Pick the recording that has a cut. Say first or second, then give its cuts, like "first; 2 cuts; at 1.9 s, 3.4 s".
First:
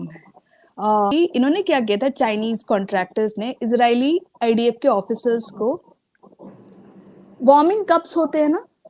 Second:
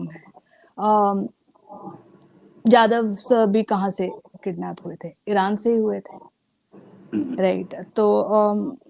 first; 1 cut; at 1.1 s